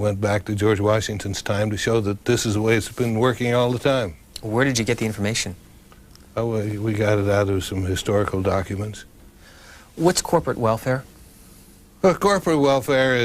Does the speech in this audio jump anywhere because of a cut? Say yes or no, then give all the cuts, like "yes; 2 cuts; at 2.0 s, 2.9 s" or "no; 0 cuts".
yes; 1 cut; at 6.6 s